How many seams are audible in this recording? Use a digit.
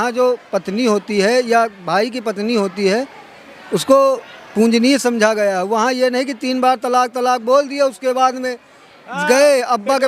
0